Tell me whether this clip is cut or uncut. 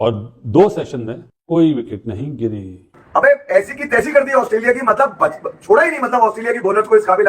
cut